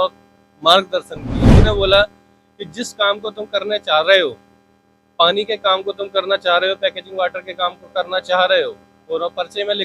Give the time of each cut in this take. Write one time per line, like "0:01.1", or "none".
0:01.5

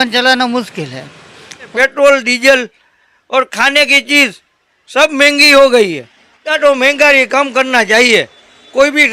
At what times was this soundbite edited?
0:01.7

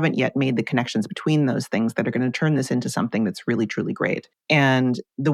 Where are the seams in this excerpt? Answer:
0:04.3

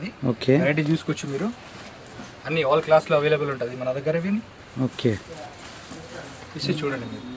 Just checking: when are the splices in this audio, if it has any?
none

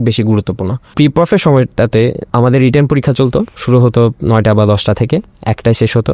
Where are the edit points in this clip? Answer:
0:00.9
0:02.2

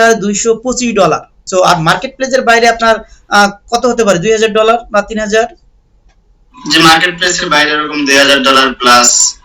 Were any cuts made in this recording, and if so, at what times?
0:01.3

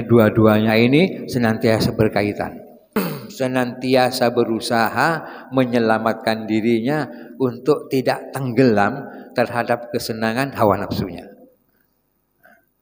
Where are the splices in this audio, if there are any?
0:03.0

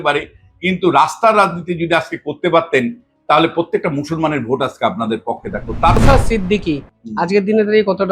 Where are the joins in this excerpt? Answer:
0:06.0

